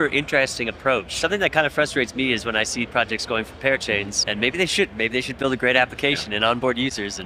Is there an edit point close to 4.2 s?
yes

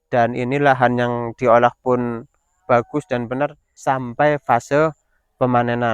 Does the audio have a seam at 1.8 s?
no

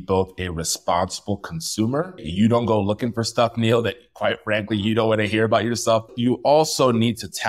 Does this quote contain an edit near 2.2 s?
yes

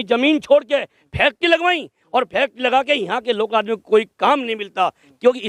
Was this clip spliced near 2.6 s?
no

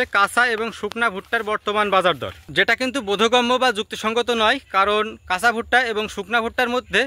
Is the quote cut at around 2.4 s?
yes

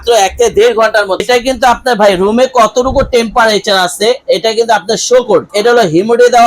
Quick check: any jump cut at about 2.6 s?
no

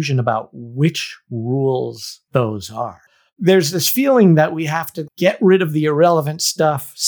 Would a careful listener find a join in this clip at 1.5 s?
no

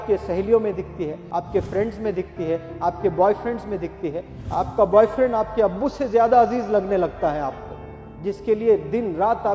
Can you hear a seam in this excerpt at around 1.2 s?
yes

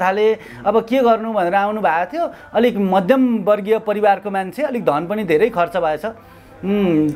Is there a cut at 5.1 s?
no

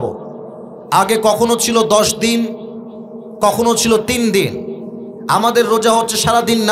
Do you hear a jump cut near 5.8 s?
no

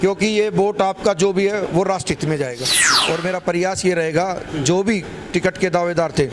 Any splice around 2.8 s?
yes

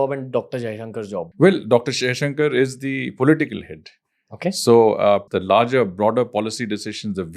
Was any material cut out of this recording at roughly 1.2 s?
yes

